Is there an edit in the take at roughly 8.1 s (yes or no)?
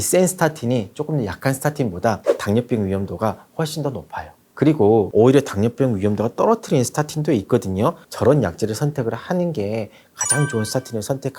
yes